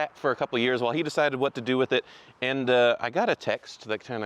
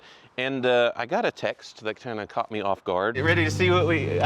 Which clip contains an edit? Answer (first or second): second